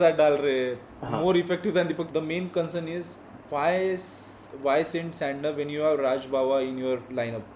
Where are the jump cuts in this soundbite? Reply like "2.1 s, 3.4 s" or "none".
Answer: 2.0 s